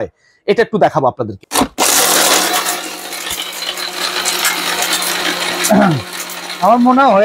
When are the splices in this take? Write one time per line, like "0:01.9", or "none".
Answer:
0:01.4